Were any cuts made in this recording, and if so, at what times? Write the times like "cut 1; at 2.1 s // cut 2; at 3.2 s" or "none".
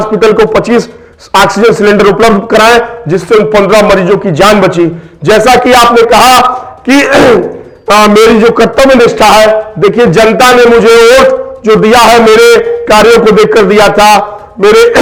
none

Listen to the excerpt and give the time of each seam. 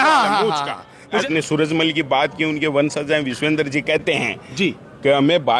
cut 1; at 1.2 s

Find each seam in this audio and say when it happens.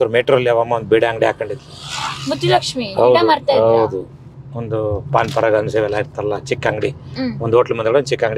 none

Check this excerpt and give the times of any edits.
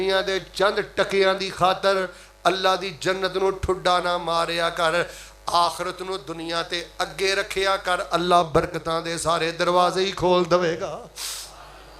none

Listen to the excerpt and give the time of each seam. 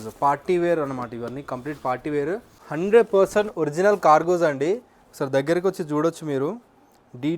cut 1; at 2.6 s

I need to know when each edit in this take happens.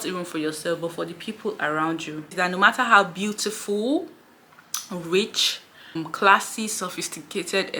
cut 1; at 2.3 s // cut 2; at 6.0 s

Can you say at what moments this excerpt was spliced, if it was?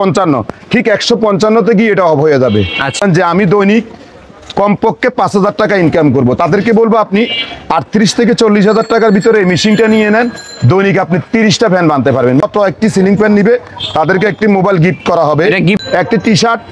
cut 1; at 3.0 s // cut 2; at 12.4 s // cut 3; at 15.8 s

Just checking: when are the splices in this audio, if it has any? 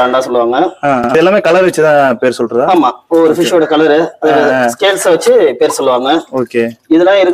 cut 1; at 1.1 s

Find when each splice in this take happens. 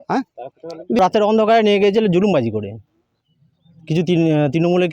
cut 1; at 1.0 s

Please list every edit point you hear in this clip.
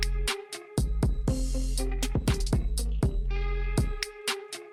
none

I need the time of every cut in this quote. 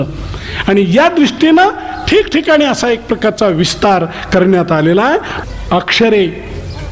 cut 1; at 5.3 s

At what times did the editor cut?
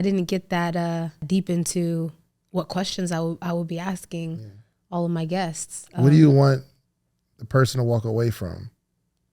cut 1; at 1.2 s

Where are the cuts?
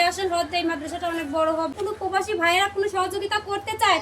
cut 1; at 1.7 s

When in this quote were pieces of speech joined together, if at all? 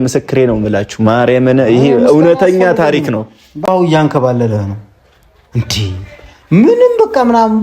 cut 1; at 3.6 s

